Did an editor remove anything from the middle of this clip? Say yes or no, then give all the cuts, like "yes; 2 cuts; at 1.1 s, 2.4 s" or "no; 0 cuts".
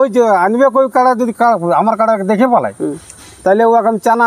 no; 0 cuts